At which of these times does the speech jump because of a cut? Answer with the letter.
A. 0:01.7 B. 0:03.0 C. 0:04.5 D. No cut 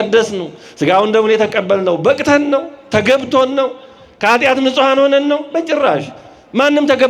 D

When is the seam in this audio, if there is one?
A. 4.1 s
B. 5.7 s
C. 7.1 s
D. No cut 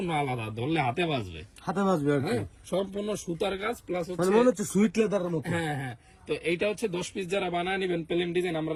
D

